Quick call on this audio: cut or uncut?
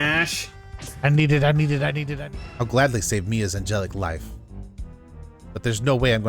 cut